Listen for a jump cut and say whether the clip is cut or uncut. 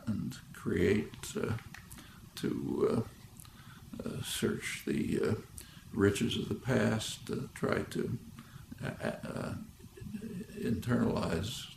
uncut